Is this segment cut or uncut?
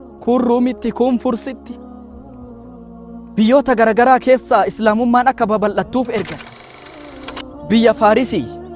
cut